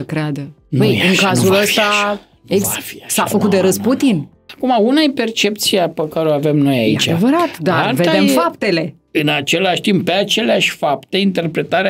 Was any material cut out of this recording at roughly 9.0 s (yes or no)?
yes